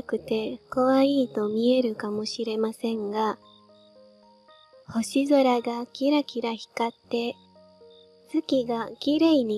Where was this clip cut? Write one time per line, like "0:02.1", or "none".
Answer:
none